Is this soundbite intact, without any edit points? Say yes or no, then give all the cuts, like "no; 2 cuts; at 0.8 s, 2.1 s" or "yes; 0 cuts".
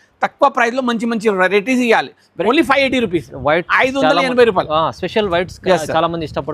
no; 1 cut; at 2.4 s